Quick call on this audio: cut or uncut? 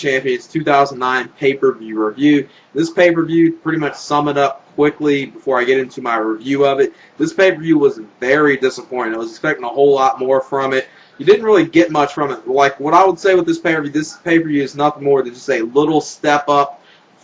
uncut